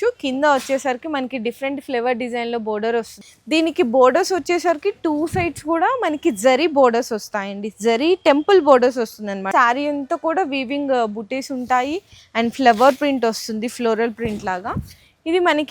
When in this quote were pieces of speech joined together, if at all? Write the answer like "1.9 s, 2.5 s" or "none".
3.3 s, 9.5 s